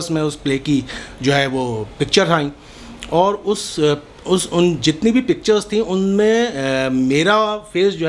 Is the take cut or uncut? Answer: uncut